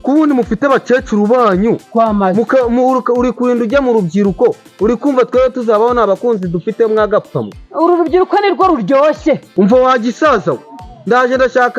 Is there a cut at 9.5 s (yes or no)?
yes